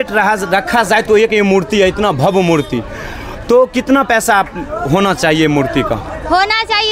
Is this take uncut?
yes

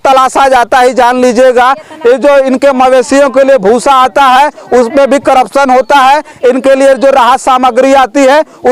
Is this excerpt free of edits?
yes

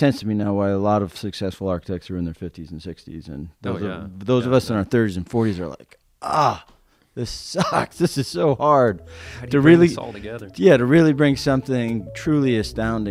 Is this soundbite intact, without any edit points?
yes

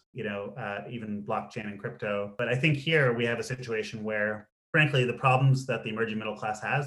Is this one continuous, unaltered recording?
no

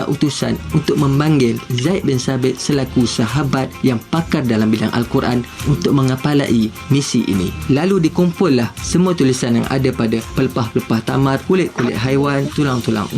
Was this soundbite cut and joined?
yes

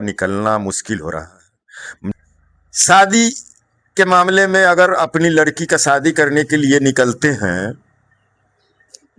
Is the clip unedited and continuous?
no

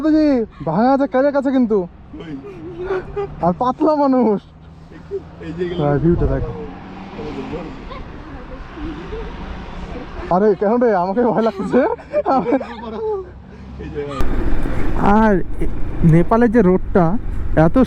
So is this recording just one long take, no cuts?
yes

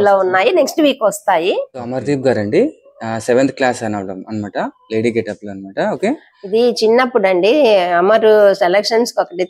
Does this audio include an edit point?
yes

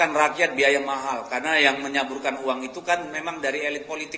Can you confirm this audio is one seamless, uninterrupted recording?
yes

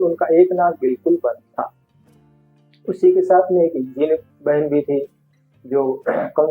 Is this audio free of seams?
yes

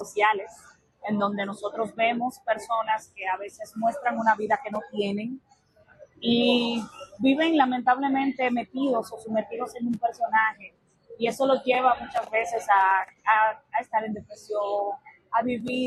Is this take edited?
no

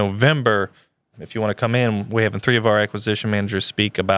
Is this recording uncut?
no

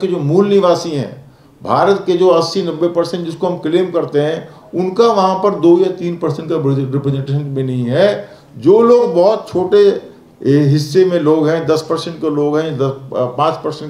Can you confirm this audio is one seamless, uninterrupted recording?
yes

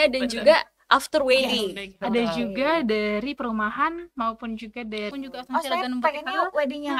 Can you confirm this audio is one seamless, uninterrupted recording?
no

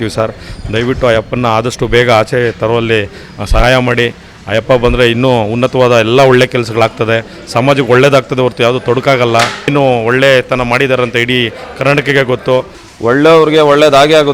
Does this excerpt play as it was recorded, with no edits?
no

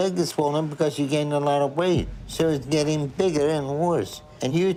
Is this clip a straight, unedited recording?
yes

